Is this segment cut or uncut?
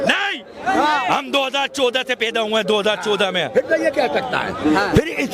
uncut